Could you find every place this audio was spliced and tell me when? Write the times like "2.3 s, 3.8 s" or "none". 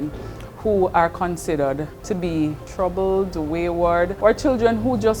2.0 s, 2.6 s, 4.1 s

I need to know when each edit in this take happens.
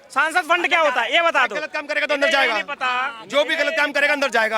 none

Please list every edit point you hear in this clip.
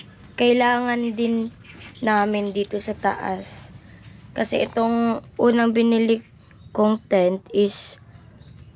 none

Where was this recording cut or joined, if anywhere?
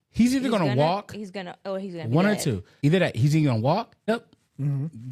2.7 s, 4.1 s

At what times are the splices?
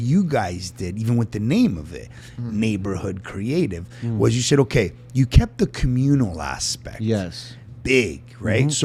none

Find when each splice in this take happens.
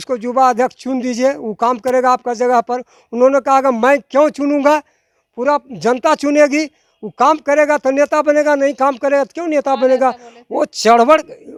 none

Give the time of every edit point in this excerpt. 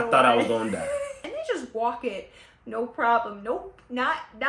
1.2 s

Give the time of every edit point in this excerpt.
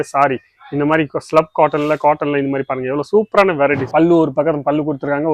3.8 s

